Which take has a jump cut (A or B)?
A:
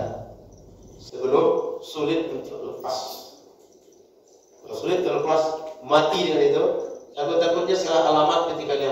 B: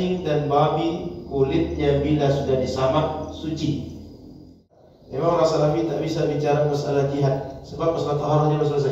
B